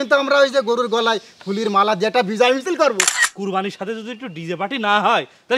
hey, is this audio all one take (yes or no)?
no